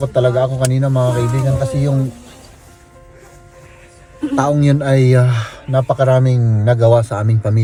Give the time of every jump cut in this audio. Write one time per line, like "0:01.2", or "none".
none